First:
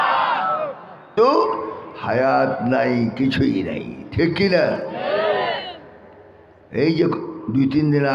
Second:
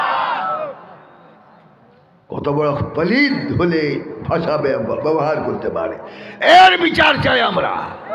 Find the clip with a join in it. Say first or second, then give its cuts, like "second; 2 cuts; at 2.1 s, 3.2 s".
first; 1 cut; at 1.1 s